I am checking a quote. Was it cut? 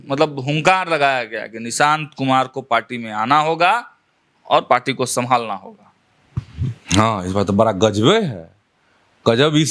no; 0 cuts

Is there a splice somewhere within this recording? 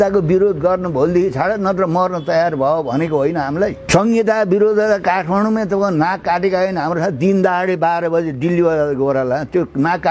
yes; 1 cut; at 3.8 s

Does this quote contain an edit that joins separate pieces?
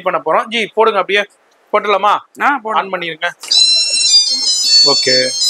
no; 0 cuts

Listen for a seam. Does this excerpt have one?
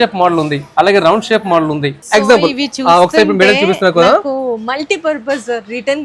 yes; 1 cut; at 1.9 s

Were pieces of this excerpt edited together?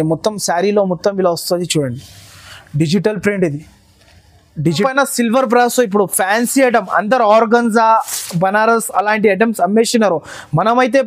yes; 1 cut; at 4.8 s

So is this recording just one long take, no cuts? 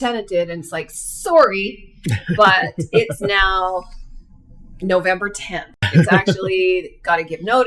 no; 1 cut; at 5.8 s

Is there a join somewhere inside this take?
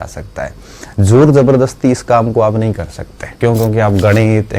yes; 1 cut; at 3.3 s

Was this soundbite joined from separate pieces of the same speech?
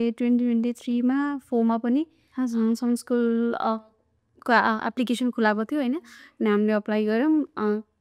no; 0 cuts

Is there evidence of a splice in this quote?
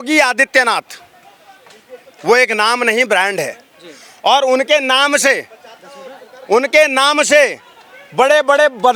no; 0 cuts

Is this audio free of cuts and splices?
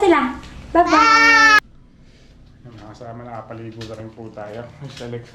no; 1 cut; at 1.6 s

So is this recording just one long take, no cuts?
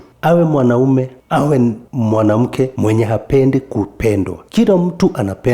yes; 0 cuts

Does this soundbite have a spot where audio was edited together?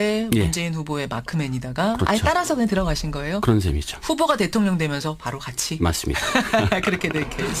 yes; 1 cut; at 3.4 s

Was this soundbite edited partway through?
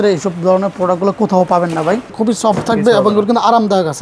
yes; 1 cut; at 2.1 s

